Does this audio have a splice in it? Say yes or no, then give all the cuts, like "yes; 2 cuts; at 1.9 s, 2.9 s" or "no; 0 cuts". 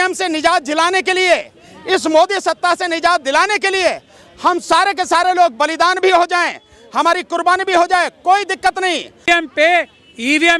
yes; 1 cut; at 9.3 s